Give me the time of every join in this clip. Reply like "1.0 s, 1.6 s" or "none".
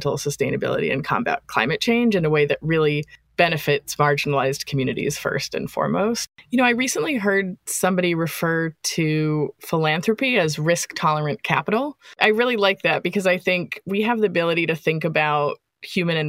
6.2 s